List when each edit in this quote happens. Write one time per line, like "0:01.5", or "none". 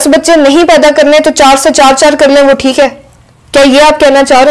none